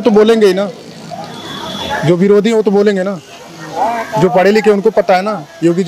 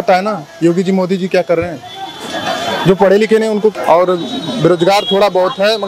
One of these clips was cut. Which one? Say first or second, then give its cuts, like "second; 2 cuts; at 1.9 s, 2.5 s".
second; 1 cut; at 3.7 s